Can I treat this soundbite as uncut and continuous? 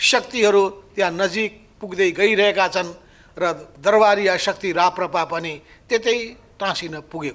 yes; 0 cuts

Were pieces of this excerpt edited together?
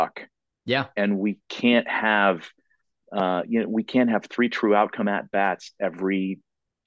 no; 0 cuts

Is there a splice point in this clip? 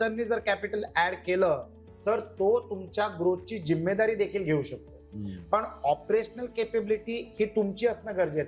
no; 0 cuts

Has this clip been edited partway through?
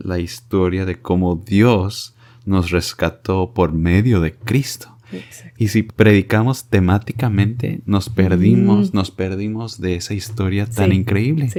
no; 0 cuts

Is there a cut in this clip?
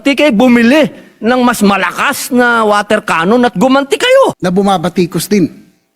yes; 1 cut; at 4.4 s

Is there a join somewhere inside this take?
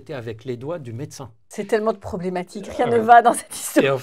yes; 1 cut; at 1.4 s

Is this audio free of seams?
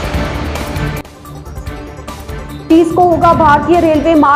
yes; 0 cuts

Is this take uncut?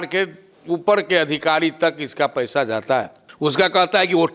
yes; 0 cuts

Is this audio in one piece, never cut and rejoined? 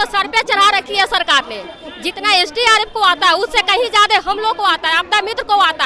yes; 0 cuts

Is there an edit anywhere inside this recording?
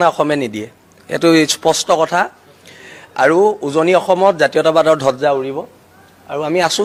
no; 0 cuts

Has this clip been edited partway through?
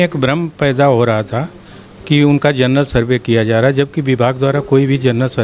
no; 0 cuts

